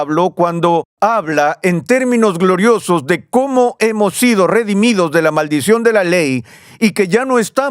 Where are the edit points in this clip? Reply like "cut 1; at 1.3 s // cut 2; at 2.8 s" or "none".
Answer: cut 1; at 0.9 s